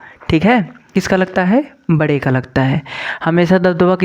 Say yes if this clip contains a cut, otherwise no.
yes